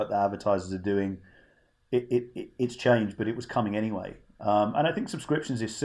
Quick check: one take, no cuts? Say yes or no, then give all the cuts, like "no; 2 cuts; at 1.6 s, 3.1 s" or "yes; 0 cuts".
yes; 0 cuts